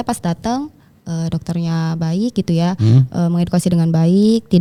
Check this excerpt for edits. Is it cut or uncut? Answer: uncut